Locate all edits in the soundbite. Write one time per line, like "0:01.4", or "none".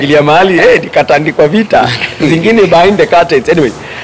none